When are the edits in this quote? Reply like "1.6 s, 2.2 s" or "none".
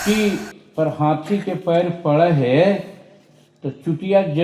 none